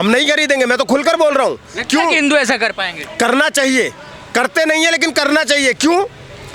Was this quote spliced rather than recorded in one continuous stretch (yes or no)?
no